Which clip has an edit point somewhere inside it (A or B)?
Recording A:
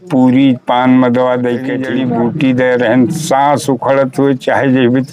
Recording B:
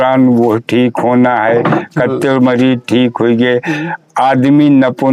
A